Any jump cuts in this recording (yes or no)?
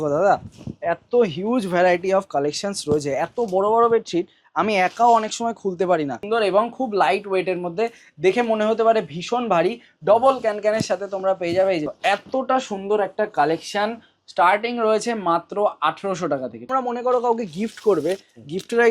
yes